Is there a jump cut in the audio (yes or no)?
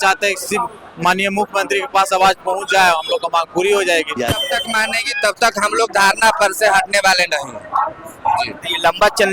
yes